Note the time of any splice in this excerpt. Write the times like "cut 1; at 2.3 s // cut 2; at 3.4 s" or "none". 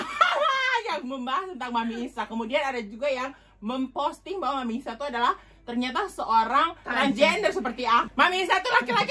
cut 1; at 8.1 s